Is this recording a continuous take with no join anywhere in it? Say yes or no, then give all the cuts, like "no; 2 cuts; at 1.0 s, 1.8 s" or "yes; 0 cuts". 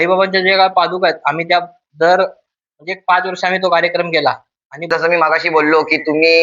no; 1 cut; at 4.9 s